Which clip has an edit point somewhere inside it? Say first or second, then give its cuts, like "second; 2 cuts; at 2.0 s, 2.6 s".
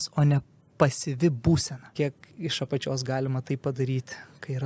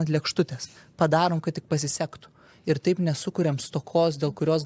first; 1 cut; at 1.9 s